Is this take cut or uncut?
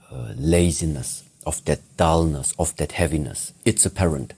cut